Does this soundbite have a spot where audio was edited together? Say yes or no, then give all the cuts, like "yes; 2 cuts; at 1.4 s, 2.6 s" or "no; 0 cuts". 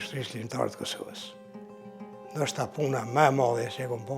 yes; 2 cuts; at 1.0 s, 2.3 s